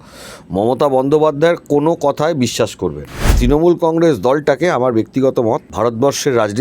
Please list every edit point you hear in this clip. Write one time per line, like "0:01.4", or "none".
0:03.3
0:05.7